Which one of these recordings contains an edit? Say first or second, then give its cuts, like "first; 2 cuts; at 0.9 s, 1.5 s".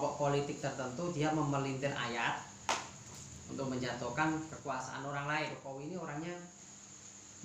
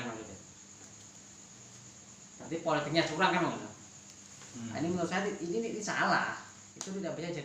first; 1 cut; at 5.6 s